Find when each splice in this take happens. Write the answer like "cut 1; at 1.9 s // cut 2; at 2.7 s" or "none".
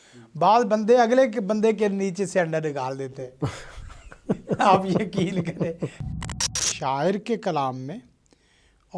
cut 1; at 6.2 s